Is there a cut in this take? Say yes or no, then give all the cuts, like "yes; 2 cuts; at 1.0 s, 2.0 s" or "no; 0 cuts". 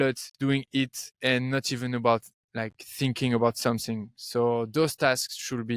yes; 1 cut; at 1.0 s